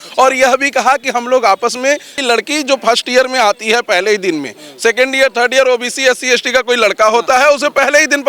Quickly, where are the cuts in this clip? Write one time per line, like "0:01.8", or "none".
0:02.2